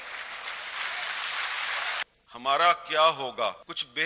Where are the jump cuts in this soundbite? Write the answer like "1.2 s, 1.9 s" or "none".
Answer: 2.0 s